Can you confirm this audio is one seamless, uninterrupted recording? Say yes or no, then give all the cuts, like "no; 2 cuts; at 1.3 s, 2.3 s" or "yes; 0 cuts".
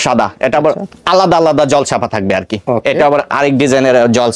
yes; 0 cuts